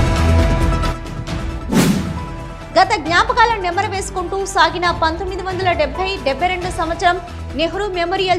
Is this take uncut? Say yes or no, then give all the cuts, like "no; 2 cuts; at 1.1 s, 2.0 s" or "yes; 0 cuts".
no; 1 cut; at 2.2 s